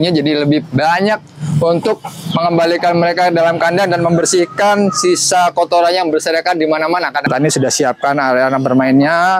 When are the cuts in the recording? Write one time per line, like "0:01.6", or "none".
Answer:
0:07.3